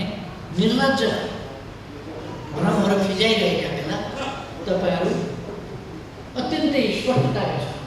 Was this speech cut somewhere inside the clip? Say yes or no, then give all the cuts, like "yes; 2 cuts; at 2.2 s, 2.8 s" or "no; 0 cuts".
no; 0 cuts